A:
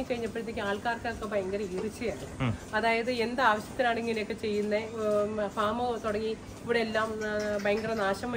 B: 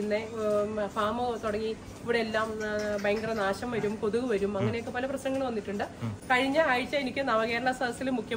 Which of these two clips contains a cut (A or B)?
B